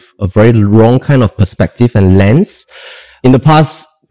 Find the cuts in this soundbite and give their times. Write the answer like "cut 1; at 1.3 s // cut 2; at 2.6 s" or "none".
cut 1; at 3.2 s